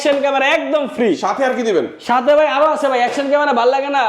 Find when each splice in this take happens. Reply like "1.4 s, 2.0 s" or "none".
none